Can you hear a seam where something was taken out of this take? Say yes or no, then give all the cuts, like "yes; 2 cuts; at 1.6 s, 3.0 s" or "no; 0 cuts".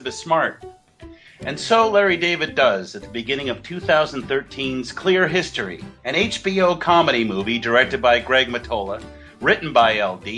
no; 0 cuts